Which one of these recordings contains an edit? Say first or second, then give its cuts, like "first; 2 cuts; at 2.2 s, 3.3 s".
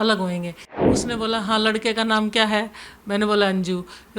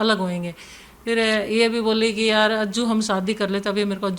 first; 1 cut; at 1.0 s